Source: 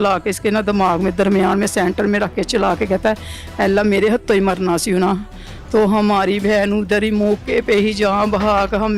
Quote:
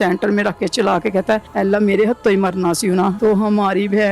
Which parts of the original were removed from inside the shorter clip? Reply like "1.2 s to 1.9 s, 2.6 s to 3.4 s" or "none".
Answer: 3.2 s to 3.5 s, 5.2 s to 5.7 s